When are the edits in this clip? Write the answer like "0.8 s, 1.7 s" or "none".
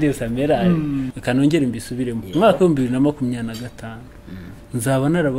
1.1 s